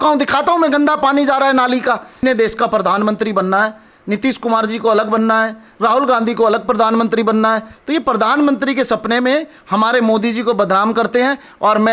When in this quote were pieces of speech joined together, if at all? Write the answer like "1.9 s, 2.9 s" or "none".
2.2 s